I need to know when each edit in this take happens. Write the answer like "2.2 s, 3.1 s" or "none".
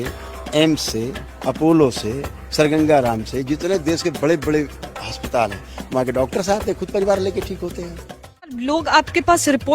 8.6 s